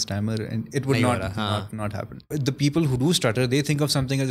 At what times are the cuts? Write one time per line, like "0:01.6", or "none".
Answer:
0:02.3